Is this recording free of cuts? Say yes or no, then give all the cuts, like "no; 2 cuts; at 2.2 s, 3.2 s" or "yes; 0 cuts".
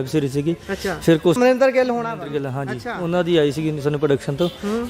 no; 1 cut; at 1.4 s